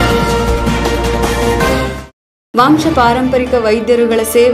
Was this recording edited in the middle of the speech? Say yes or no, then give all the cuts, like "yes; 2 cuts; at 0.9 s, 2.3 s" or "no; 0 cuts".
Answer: no; 0 cuts